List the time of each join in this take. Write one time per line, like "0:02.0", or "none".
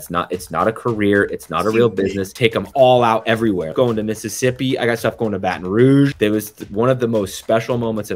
0:02.3
0:03.7
0:06.1